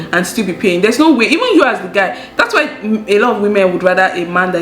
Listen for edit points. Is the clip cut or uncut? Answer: uncut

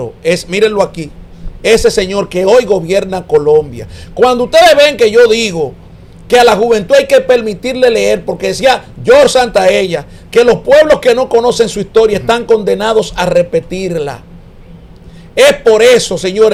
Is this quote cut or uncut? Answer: uncut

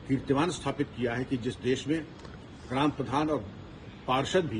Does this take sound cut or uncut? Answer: uncut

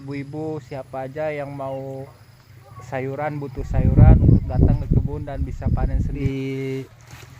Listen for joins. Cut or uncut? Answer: cut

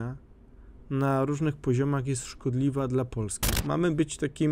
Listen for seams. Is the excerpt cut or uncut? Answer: cut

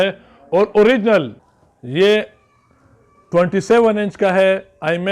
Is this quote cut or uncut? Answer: cut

